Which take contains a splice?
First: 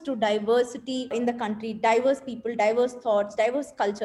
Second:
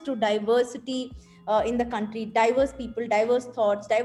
first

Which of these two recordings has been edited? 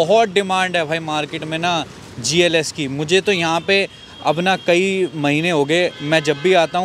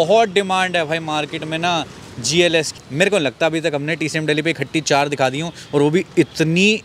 second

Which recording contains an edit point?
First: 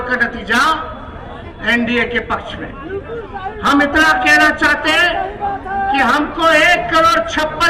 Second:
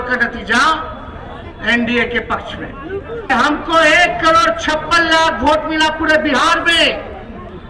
second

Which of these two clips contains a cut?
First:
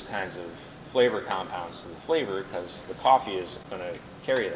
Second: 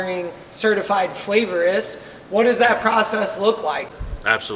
first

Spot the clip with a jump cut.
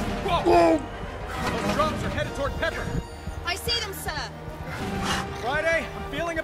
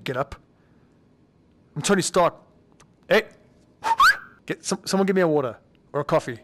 second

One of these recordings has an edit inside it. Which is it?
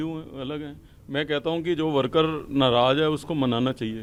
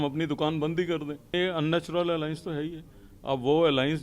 second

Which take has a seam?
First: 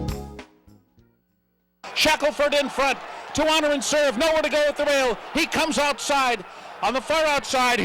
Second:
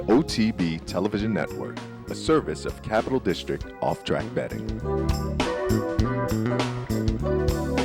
first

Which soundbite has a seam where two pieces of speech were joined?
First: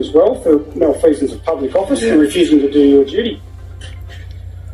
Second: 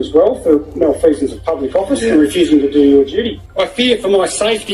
second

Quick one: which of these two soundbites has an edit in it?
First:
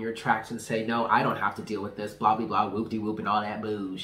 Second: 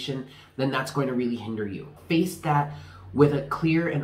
second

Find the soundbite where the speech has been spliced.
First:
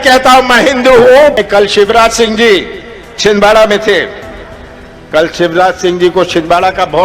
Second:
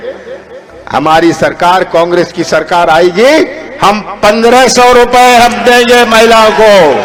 first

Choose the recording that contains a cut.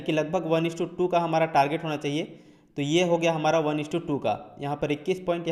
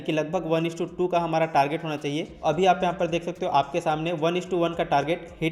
second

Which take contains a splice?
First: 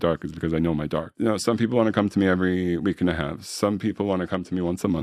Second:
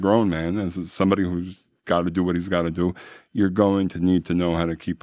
first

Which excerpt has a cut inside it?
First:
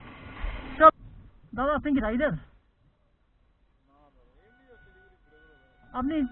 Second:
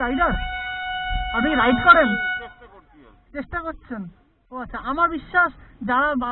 first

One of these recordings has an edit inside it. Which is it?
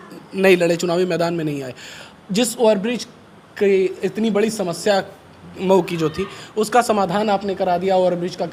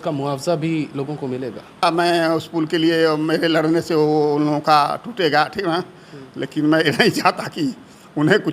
second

